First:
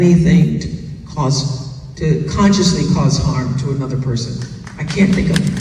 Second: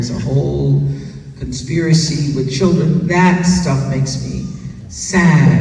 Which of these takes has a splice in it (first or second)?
first